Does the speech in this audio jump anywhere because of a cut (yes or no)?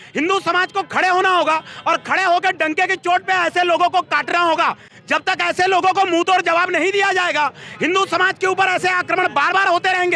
no